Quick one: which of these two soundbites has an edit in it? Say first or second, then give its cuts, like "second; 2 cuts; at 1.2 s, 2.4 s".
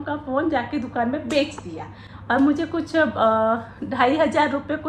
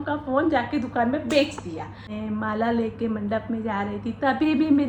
second; 1 cut; at 2.1 s